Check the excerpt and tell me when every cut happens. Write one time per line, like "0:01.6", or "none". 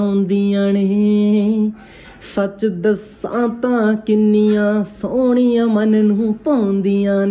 none